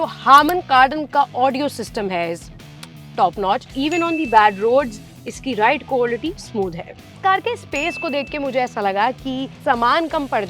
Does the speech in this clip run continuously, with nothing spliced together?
no; 3 cuts; at 3.7 s, 7.1 s, 9.5 s

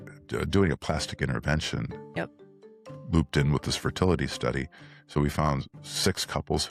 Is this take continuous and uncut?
yes; 0 cuts

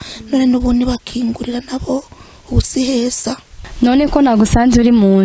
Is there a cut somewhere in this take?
yes; 1 cut; at 3.5 s

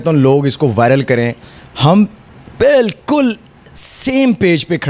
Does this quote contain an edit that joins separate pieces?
no; 0 cuts

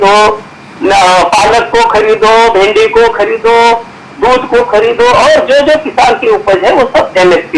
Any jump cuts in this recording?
no; 0 cuts

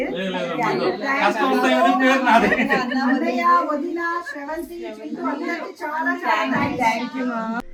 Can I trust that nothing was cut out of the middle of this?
yes; 0 cuts

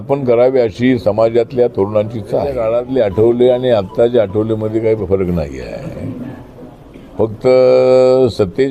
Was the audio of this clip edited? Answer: yes; 1 cut; at 2.6 s

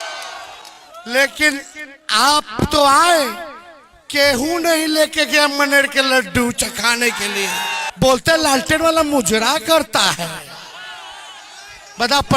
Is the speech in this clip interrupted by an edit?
yes; 1 cut; at 7.9 s

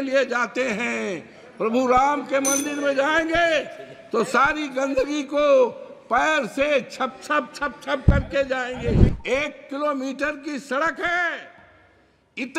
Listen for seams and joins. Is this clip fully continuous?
no; 1 cut; at 9.1 s

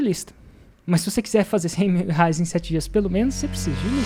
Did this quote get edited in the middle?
no; 0 cuts

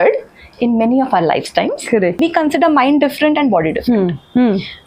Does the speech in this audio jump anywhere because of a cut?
yes; 1 cut; at 2.2 s

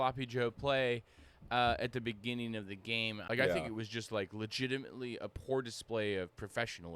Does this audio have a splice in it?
yes; 1 cut; at 3.2 s

